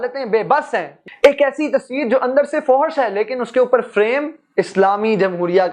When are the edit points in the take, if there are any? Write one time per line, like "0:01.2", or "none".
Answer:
0:01.0